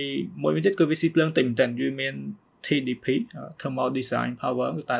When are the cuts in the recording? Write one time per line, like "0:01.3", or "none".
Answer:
none

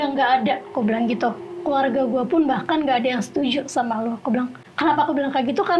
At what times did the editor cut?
none

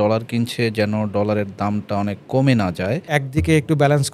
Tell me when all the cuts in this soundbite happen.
0:03.1

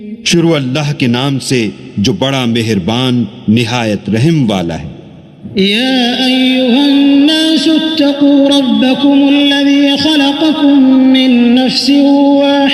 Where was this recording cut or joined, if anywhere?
0:03.4
0:10.3

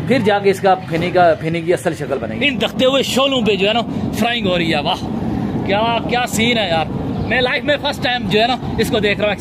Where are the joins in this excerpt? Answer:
0:02.4

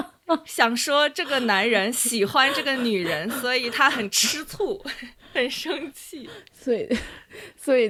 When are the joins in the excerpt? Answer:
none

